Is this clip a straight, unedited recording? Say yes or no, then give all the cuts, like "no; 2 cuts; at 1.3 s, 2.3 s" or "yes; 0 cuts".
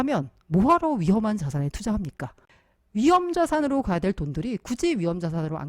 no; 1 cut; at 2.5 s